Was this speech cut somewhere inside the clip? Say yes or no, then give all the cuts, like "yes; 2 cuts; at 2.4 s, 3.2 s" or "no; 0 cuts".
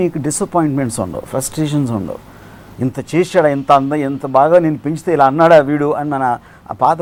no; 0 cuts